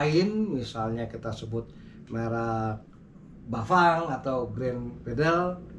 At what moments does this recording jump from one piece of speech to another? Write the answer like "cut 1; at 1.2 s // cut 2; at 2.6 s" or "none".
none